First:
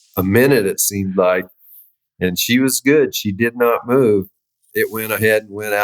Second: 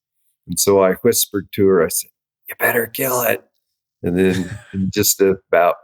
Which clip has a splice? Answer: first; 1 cut; at 4.7 s

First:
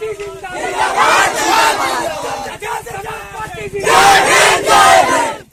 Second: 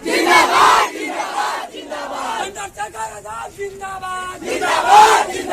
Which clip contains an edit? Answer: second; 1 cut; at 1.3 s

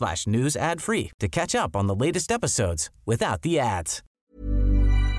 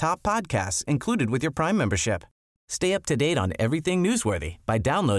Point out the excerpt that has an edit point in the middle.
first; 1 cut; at 4.0 s

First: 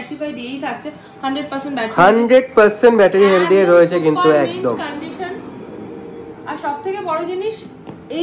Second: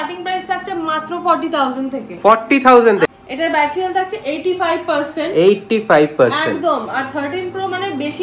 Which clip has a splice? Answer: second; 1 cut; at 3.1 s

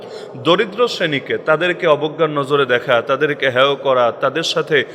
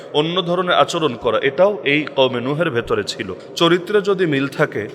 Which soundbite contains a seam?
second; 1 cut; at 3.3 s

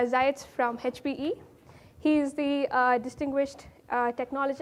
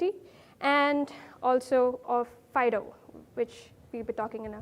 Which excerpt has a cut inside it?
second; 1 cut; at 2.2 s

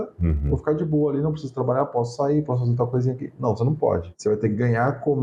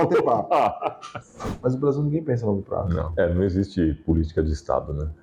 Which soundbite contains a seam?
second; 2 cuts; at 1.4 s, 3.0 s

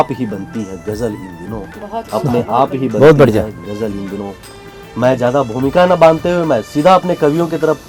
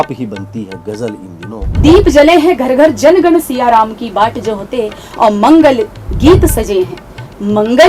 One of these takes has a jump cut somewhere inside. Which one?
second; 1 cut; at 1.8 s

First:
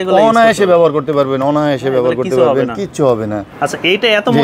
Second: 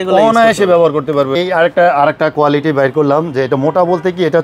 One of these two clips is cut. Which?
second; 1 cut; at 1.3 s

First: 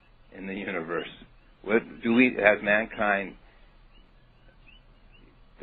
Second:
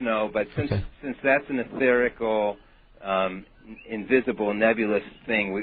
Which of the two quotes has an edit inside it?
second; 1 cut; at 2.1 s

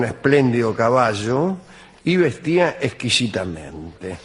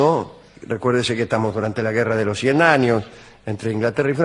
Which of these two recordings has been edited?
second; 1 cut; at 1.3 s

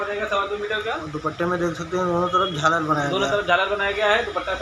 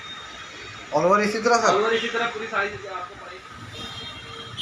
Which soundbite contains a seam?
second; 1 cut; at 3.1 s

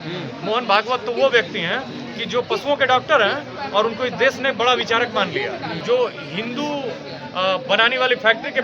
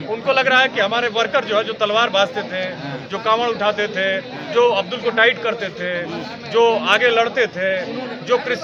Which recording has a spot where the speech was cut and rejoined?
first; 1 cut; at 5.8 s

